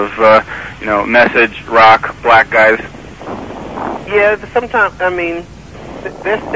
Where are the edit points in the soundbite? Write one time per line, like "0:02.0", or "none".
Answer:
0:01.0